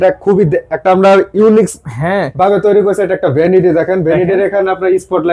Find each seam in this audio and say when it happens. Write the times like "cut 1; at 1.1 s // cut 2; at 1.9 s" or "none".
none

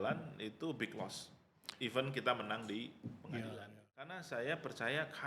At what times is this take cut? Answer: cut 1; at 4.2 s

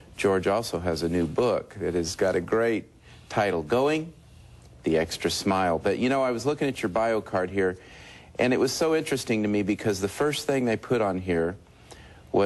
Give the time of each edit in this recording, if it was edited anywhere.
cut 1; at 8.8 s

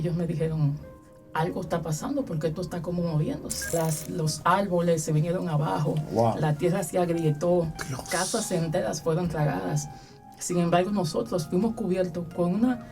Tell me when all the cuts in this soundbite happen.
cut 1; at 3.7 s

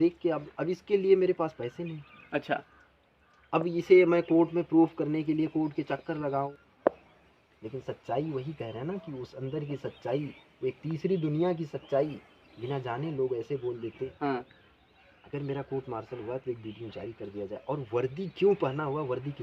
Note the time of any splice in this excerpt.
cut 1; at 6.5 s // cut 2; at 14.1 s

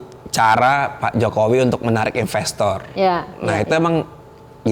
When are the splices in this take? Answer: none

